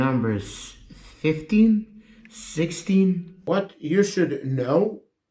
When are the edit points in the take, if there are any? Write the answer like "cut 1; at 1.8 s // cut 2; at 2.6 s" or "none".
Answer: cut 1; at 3.3 s